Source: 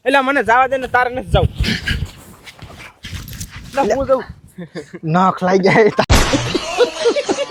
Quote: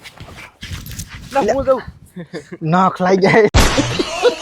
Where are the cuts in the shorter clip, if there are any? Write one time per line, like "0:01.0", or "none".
0:03.5